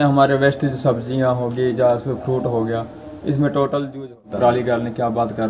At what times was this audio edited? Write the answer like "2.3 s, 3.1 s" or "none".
4.2 s